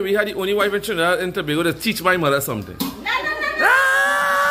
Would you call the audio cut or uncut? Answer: uncut